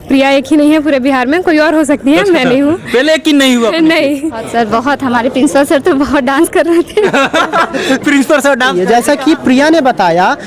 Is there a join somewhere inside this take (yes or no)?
yes